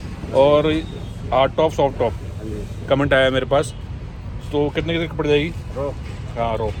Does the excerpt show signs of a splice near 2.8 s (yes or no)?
no